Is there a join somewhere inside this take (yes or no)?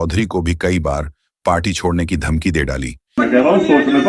yes